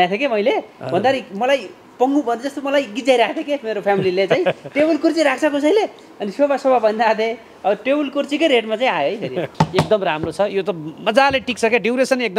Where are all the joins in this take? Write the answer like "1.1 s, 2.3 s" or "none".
9.5 s